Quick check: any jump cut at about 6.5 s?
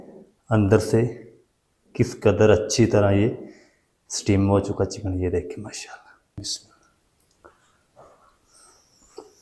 yes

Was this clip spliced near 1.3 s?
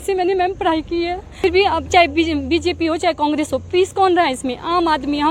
yes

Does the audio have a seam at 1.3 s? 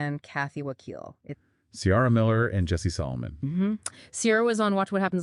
yes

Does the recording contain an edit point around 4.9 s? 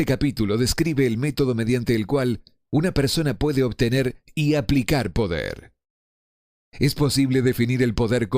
yes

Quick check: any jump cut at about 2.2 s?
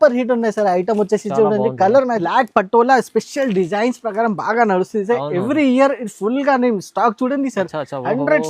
yes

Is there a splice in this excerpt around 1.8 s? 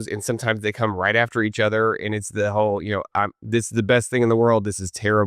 no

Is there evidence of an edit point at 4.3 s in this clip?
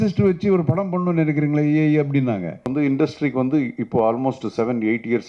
no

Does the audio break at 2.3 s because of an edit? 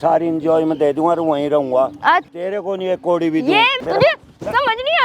yes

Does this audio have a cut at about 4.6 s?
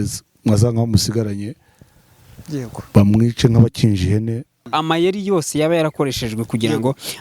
yes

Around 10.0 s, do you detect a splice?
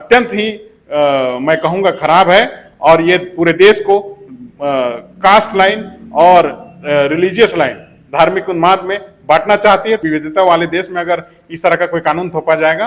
yes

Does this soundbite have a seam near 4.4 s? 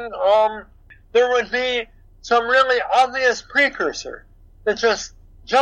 no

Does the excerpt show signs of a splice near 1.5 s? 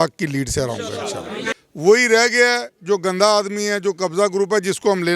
yes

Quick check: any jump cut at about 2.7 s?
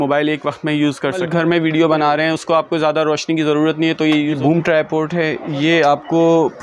no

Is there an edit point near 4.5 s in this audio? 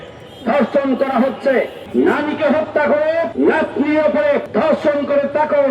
yes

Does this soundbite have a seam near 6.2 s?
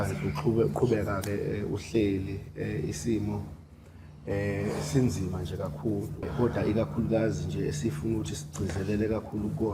yes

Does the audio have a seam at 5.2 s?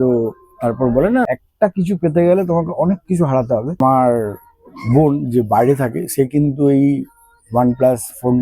no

